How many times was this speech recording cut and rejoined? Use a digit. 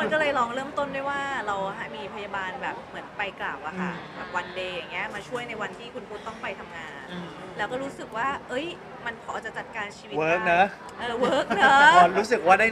0